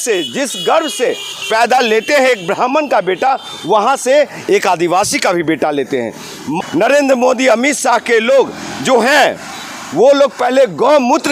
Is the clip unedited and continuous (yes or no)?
no